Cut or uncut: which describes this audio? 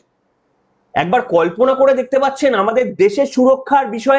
uncut